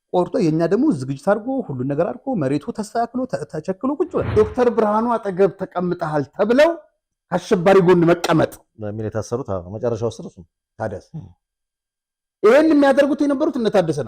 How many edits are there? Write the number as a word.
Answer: one